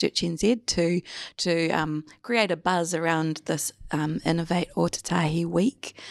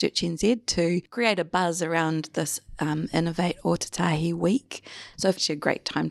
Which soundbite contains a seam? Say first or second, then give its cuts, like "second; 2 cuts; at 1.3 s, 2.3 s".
second; 2 cuts; at 1.1 s, 5.1 s